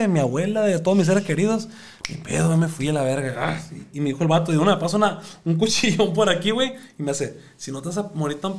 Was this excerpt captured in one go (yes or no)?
yes